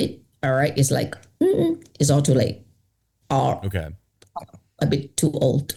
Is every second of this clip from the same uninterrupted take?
yes; 0 cuts

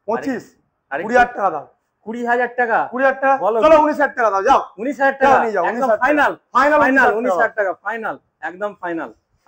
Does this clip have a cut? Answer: no; 0 cuts

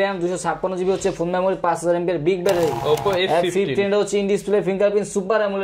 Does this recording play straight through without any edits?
no; 1 cut; at 2.8 s

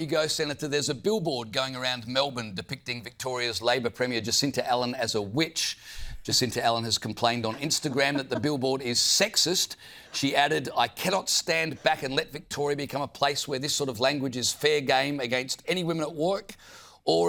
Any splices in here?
no; 0 cuts

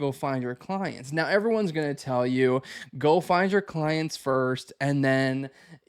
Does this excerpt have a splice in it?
no; 0 cuts

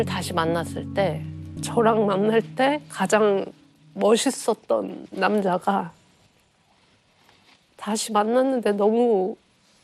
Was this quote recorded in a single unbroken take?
no; 1 cut; at 1.6 s

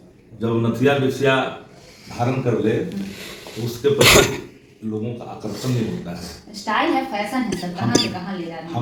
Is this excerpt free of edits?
yes; 0 cuts

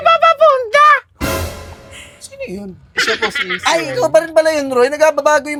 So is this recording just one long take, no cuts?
yes; 0 cuts

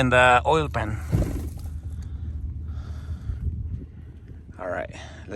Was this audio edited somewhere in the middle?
no; 0 cuts

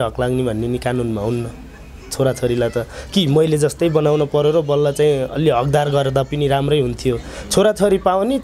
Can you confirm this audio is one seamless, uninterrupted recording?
yes; 0 cuts

